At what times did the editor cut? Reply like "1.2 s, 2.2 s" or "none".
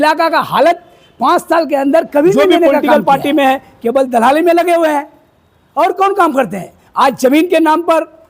2.7 s